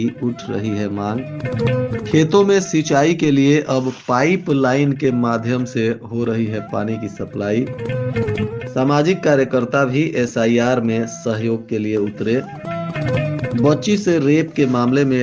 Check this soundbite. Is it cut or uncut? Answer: uncut